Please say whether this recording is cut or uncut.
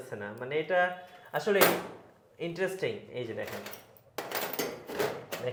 uncut